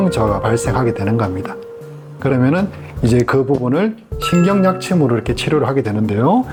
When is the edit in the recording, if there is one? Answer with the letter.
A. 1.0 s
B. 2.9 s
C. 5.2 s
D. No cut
D